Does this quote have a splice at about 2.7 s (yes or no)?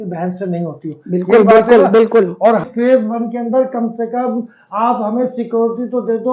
yes